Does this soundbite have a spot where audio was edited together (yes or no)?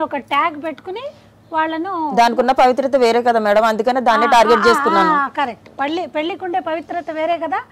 no